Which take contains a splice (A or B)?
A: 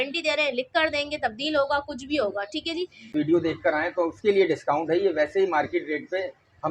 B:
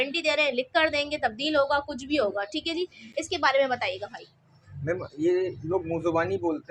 A